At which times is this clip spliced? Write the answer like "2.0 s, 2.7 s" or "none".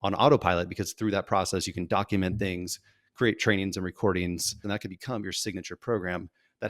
4.6 s